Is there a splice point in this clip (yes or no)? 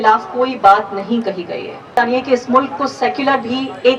yes